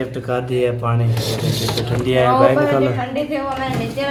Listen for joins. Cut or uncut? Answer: uncut